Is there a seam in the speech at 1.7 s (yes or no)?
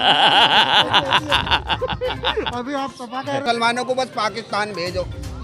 no